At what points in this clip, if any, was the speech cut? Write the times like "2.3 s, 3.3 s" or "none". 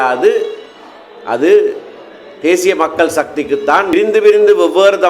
3.9 s